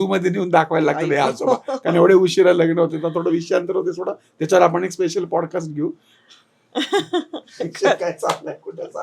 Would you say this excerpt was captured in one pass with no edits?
yes; 0 cuts

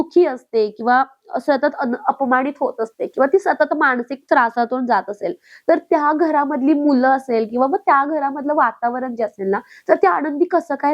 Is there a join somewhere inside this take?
no; 0 cuts

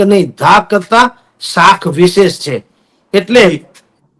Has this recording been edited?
no; 0 cuts

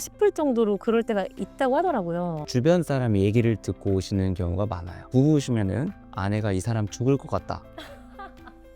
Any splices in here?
yes; 1 cut; at 2.4 s

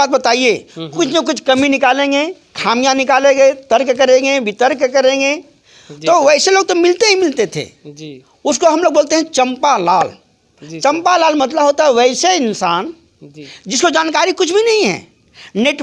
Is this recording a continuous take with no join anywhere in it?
yes; 0 cuts

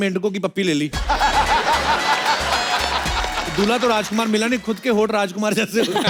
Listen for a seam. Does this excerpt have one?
no; 0 cuts

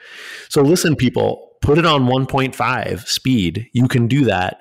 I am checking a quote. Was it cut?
no; 0 cuts

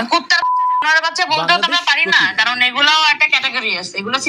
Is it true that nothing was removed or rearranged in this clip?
yes; 0 cuts

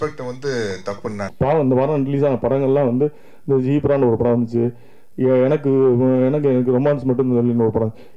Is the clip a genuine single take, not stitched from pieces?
no; 1 cut; at 1.3 s

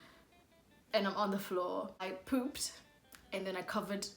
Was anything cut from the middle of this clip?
yes; 1 cut; at 2.0 s

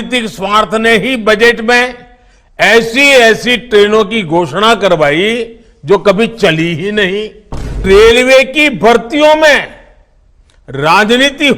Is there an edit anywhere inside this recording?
yes; 1 cut; at 7.8 s

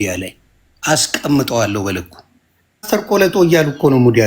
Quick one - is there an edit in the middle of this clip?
yes; 1 cut; at 2.9 s

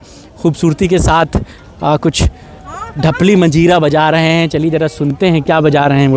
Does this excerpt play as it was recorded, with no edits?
yes; 0 cuts

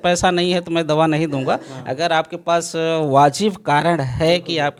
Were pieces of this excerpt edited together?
no; 0 cuts

